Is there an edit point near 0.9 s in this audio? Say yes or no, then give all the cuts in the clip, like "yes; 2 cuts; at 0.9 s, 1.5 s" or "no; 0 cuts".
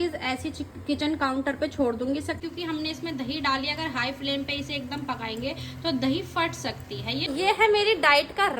no; 2 cuts; at 2.4 s, 7.3 s